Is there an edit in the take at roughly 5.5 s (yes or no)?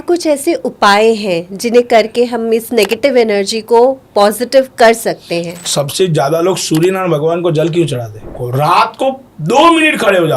yes